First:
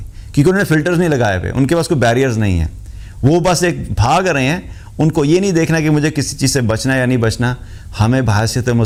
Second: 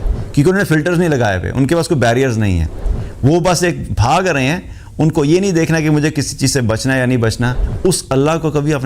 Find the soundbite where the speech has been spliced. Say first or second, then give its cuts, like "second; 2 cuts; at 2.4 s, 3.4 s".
second; 1 cut; at 7.6 s